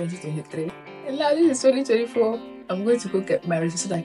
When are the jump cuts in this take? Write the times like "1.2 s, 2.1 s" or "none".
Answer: 0.9 s